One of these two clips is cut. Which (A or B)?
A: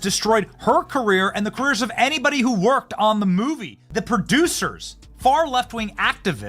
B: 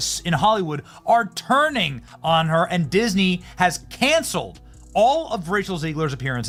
A